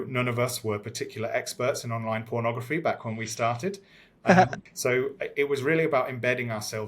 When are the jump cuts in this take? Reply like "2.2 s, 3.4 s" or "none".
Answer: 4.6 s